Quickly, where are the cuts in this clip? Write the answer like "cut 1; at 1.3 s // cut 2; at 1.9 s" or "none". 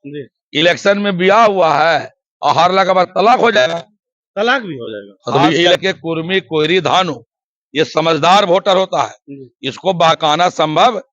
cut 1; at 5.8 s